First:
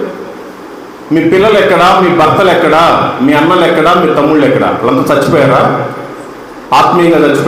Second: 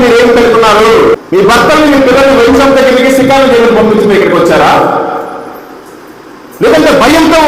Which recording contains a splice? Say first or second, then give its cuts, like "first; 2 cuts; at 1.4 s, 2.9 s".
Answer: second; 1 cut; at 1.1 s